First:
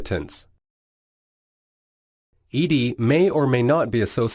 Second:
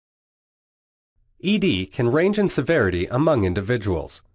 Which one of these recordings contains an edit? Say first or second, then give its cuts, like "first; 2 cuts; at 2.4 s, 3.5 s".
second; 1 cut; at 2.0 s